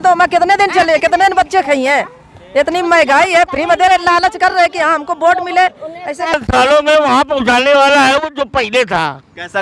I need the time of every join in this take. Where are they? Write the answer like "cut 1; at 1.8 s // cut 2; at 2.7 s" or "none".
cut 1; at 6.3 s